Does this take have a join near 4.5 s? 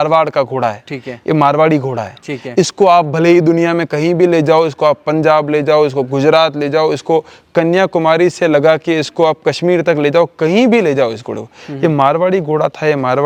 no; 0 cuts

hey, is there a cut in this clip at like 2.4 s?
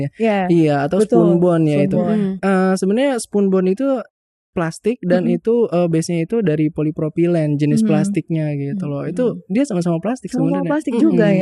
yes; 1 cut; at 2.4 s

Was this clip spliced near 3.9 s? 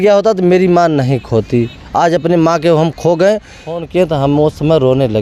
yes; 1 cut; at 3.9 s

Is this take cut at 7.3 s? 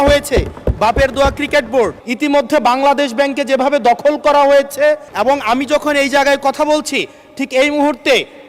no; 2 cuts; at 2.0 s, 5.1 s

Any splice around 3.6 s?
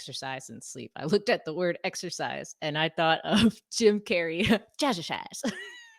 no; 0 cuts

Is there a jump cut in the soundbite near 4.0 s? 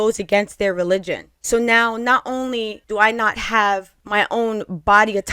yes; 2 cuts; at 2.8 s, 4.0 s

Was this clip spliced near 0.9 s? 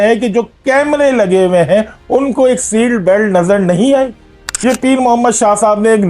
no; 1 cut; at 4.6 s

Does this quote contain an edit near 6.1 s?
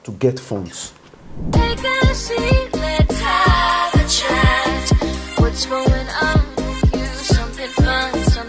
no; 1 cut; at 1.4 s

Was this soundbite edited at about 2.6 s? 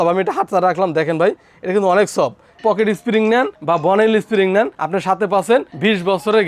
yes; 1 cut; at 2.6 s

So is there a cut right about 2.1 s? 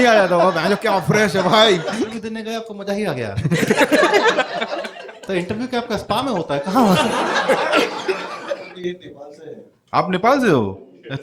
yes; 2 cuts; at 2.1 s, 8.7 s

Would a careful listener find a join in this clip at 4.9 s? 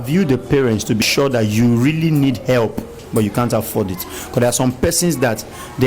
no; 1 cut; at 1.0 s

